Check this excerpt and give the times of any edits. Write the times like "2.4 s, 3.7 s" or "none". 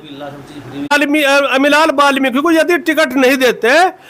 0.9 s